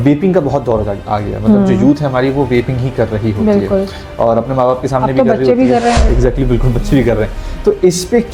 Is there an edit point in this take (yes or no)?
no